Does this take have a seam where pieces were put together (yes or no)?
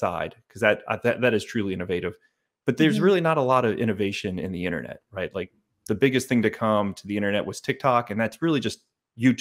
no